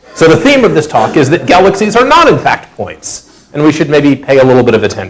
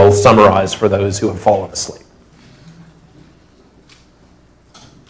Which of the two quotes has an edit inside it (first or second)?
first